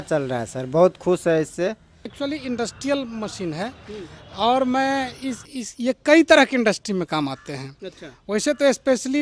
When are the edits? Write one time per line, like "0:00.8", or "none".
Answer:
0:02.0